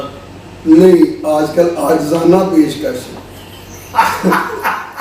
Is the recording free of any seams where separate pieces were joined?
yes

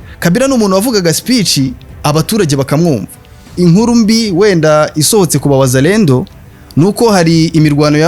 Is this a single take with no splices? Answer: no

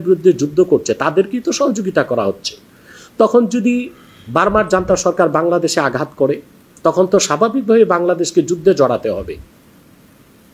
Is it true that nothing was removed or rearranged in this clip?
yes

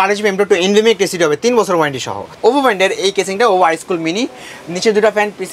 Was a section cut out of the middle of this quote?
yes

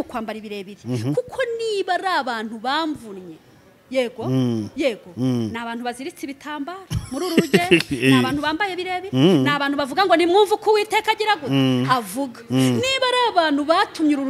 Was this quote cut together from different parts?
no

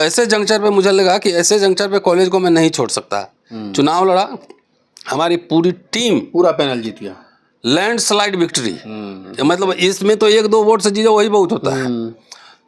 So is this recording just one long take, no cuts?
yes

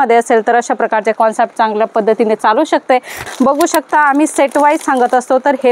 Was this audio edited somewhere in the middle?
yes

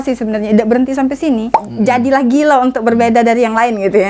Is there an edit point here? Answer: yes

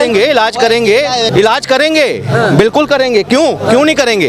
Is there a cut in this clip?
yes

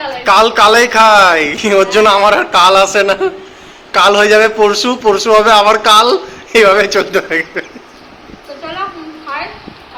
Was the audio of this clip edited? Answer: no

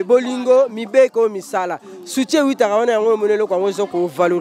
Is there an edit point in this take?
no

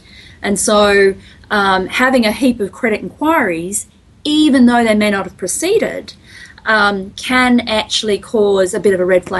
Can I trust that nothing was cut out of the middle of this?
yes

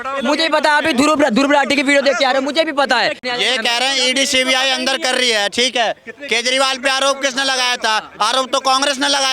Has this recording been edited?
yes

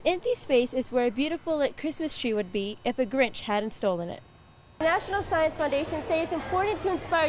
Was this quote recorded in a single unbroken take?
no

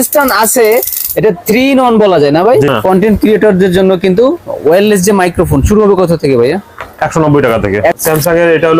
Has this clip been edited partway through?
yes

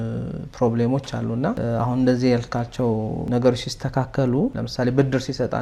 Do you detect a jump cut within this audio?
yes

